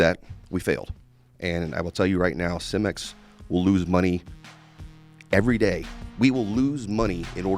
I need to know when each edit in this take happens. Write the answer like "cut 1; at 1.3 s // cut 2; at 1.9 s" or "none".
cut 1; at 6.0 s